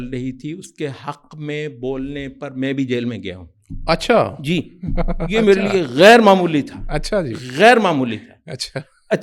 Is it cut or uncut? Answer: uncut